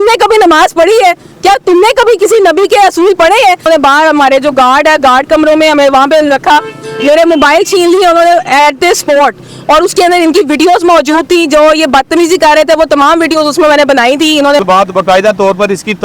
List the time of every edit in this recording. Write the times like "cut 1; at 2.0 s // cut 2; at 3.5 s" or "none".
cut 1; at 3.6 s // cut 2; at 14.6 s